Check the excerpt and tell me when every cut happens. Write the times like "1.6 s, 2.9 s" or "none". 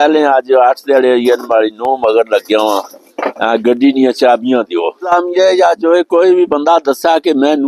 5.1 s

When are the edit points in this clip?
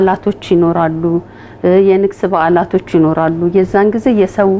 none

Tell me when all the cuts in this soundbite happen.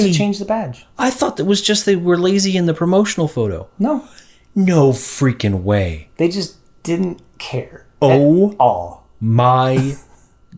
none

